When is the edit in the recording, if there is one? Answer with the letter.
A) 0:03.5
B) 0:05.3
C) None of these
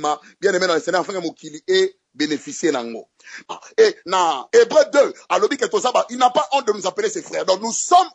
A